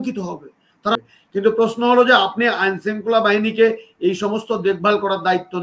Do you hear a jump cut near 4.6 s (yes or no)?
no